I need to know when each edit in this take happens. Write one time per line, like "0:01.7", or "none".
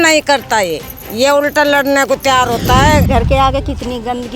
0:03.1